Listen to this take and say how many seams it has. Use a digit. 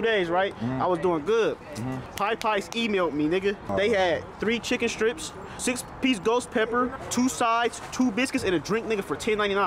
2